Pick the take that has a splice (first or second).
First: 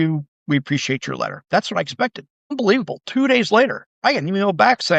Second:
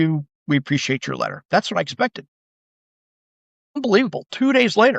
first